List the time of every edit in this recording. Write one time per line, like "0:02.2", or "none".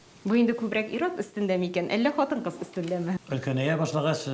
0:03.2